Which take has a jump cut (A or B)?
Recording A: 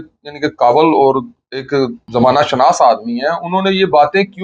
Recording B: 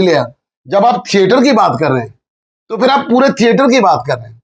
A